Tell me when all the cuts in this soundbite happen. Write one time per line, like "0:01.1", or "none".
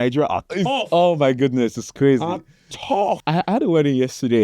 0:03.2